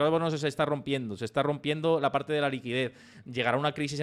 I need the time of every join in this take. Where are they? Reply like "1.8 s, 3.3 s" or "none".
none